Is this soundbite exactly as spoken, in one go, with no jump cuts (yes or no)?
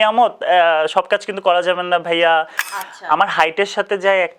no